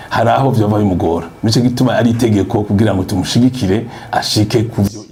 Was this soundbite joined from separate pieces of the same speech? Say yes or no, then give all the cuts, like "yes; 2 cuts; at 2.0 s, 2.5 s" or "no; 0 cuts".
no; 0 cuts